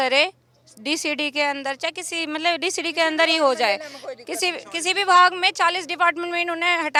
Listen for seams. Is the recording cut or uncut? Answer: uncut